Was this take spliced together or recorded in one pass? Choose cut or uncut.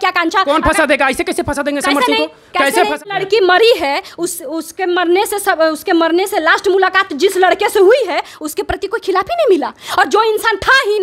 cut